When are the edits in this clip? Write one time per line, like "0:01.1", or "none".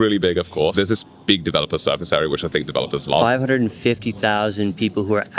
0:00.7
0:03.2

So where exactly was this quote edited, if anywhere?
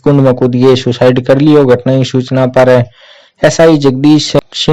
none

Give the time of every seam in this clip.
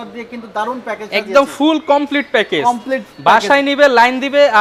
none

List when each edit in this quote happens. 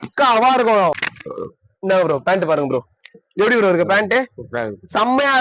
0:01.0

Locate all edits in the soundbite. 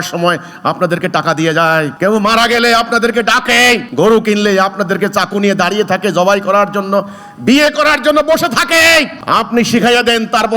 0:01.9
0:03.9
0:09.2

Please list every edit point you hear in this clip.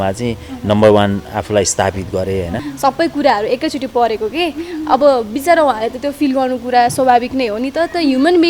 0:02.7

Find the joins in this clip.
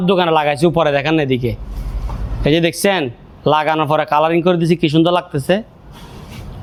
none

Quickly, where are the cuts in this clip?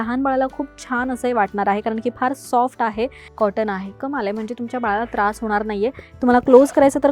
0:03.2

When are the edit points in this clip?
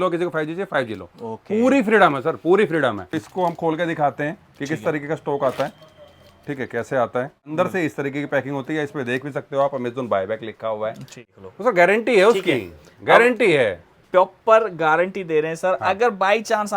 0:03.1
0:07.5
0:11.3

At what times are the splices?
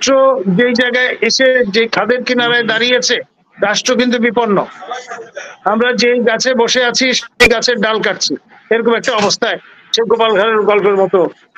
none

